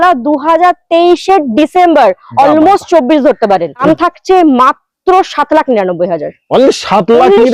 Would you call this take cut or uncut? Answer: cut